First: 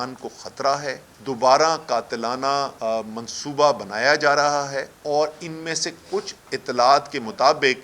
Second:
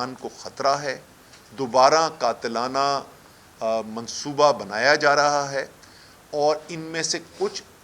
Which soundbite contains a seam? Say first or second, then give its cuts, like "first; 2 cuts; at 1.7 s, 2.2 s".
first; 4 cuts; at 1.1 s, 2.7 s, 4.9 s, 6.4 s